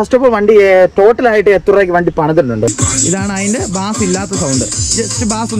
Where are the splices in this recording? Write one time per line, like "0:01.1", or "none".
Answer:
0:02.8